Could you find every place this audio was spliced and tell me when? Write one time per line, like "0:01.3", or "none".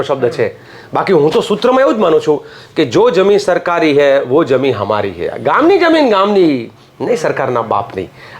none